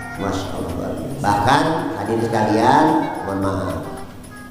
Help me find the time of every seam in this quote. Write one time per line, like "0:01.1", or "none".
0:01.1